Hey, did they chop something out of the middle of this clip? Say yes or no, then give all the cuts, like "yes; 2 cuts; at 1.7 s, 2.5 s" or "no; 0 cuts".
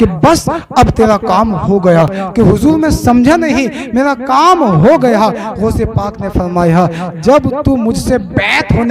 yes; 1 cut; at 2.2 s